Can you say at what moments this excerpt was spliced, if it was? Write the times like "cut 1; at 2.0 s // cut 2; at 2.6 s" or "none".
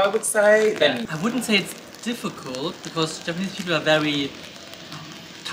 cut 1; at 1.1 s